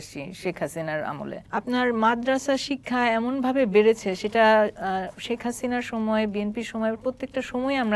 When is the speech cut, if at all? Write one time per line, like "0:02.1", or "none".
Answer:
0:01.4

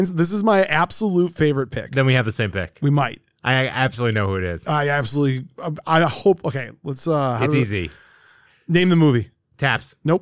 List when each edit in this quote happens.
none

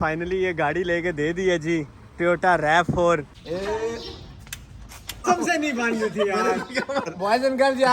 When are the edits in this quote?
0:03.4
0:05.2

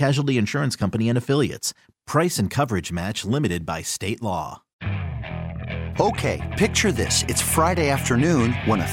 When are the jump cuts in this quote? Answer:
0:04.7

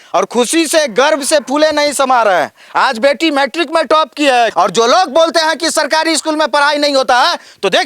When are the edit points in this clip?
0:04.5

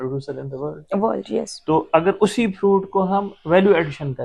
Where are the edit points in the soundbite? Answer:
none

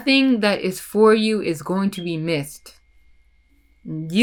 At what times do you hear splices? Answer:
none

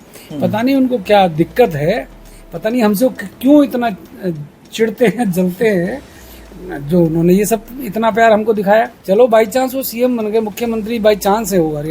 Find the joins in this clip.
0:09.0

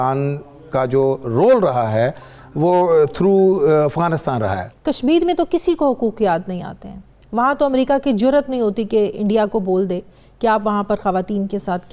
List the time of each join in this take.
0:04.6

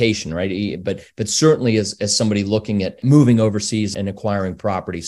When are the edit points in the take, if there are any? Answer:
0:03.0
0:03.9

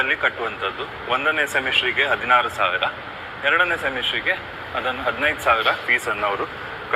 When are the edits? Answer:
none

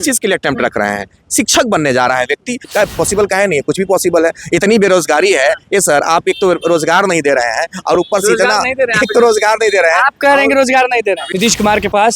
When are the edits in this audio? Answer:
0:02.6
0:11.3

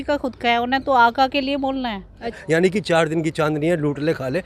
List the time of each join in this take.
0:02.4

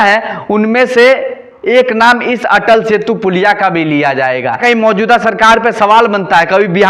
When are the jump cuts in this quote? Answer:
0:04.6

